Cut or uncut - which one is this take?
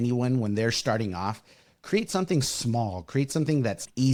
uncut